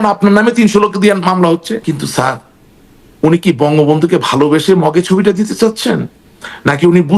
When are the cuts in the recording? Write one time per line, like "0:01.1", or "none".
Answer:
0:01.8